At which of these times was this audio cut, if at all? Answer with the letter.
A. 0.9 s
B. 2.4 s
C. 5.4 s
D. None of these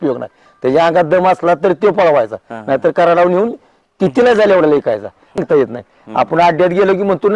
C